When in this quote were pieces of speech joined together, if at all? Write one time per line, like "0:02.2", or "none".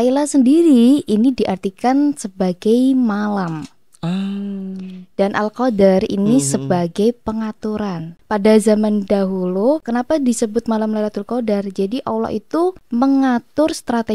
0:08.2
0:09.9
0:12.8